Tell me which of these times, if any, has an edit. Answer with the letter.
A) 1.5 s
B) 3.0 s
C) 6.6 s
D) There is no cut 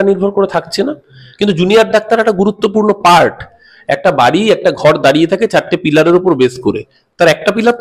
D